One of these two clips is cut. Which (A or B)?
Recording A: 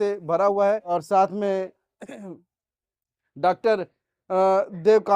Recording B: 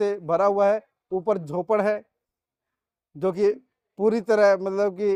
A